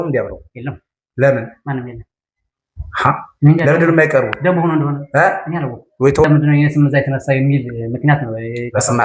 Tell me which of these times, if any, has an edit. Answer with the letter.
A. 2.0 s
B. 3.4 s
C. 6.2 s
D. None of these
C